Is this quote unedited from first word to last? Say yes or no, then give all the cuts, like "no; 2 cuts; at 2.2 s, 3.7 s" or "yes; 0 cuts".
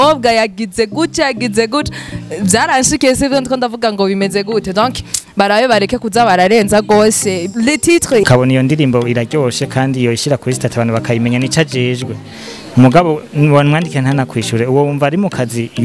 no; 1 cut; at 8.2 s